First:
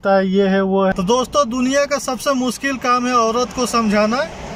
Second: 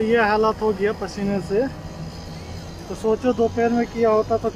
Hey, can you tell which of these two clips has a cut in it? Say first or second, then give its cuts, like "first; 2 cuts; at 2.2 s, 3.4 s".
first; 1 cut; at 0.9 s